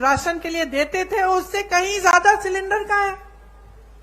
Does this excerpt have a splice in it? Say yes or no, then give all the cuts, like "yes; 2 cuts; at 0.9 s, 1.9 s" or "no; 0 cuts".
no; 0 cuts